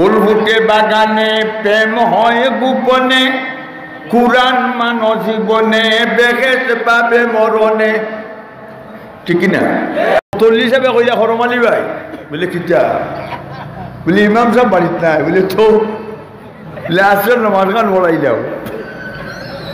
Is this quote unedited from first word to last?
no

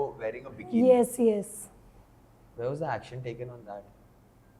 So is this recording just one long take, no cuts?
yes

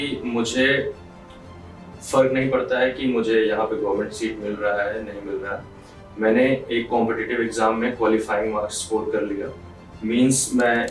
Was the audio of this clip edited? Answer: no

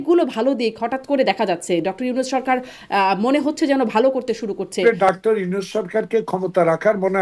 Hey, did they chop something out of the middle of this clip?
yes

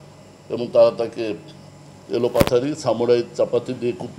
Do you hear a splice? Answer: no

